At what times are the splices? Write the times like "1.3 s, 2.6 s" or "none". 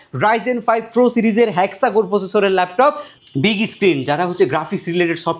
3.1 s